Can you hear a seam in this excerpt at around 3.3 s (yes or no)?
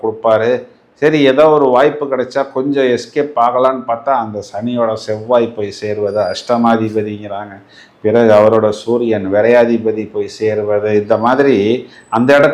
no